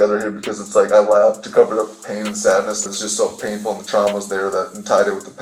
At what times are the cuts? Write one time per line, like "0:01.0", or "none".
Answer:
0:03.0